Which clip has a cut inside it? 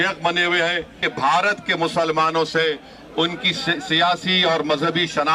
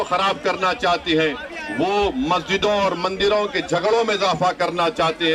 first; 1 cut; at 1.0 s

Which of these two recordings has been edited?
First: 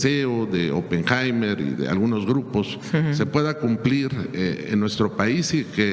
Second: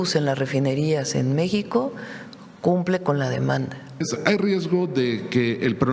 second; 1 cut; at 4.1 s

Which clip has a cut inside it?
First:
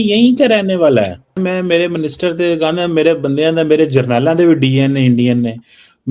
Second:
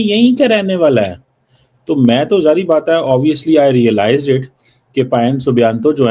first; 1 cut; at 1.4 s

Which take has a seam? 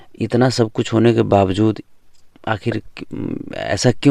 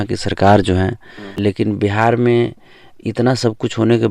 second; 1 cut; at 1.3 s

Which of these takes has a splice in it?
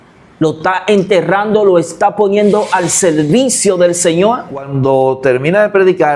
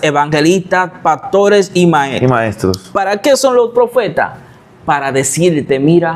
first; 1 cut; at 4.7 s

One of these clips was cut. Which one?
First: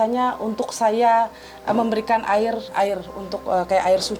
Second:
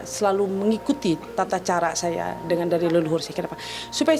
first; 1 cut; at 2.6 s

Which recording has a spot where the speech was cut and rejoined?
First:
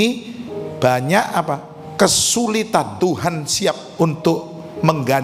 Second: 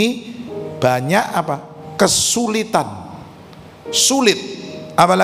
first; 1 cut; at 2.9 s

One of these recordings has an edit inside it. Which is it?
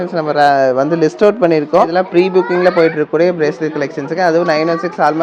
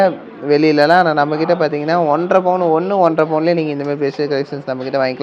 first; 1 cut; at 2.0 s

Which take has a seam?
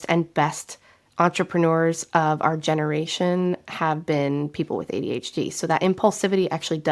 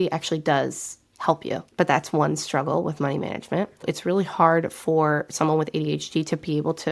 second; 2 cuts; at 1.6 s, 3.8 s

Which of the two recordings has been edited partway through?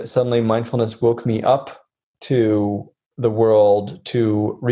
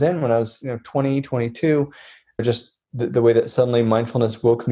second; 1 cut; at 2.4 s

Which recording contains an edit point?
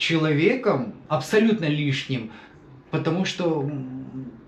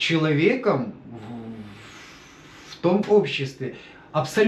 first; 1 cut; at 1.0 s

